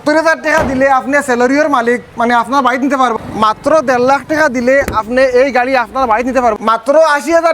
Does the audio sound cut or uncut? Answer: cut